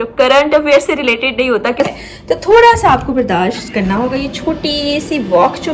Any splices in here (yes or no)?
yes